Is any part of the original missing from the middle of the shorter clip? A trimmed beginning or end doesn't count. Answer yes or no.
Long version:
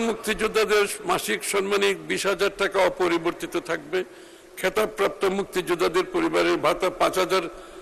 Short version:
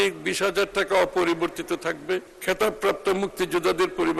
yes